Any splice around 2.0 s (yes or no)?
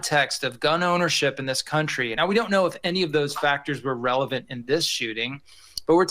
yes